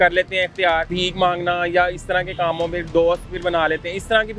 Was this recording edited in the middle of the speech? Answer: yes; 1 cut; at 0.9 s

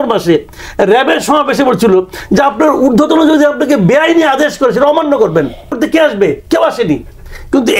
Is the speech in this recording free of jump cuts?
no; 1 cut; at 5.7 s

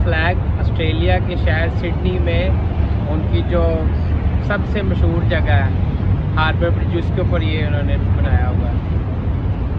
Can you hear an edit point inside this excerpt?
no; 0 cuts

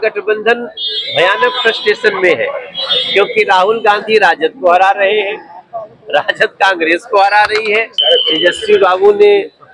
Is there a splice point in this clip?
yes; 1 cut; at 7.9 s

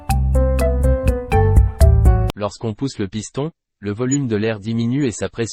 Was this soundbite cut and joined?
yes; 1 cut; at 2.3 s

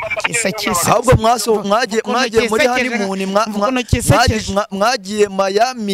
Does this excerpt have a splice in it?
no; 0 cuts

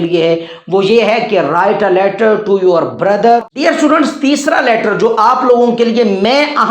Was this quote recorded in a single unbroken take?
no; 1 cut; at 3.4 s

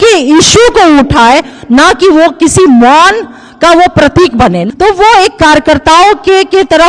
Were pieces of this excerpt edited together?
yes; 1 cut; at 4.6 s

